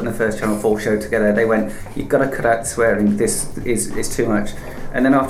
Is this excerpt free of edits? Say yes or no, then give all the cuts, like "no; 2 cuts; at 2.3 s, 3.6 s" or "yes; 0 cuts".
yes; 0 cuts